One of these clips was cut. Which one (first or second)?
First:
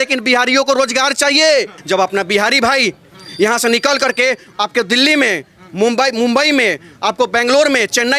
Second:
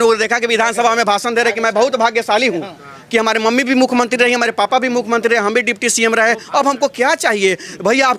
first